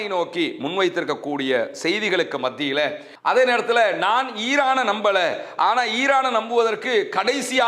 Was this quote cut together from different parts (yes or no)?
yes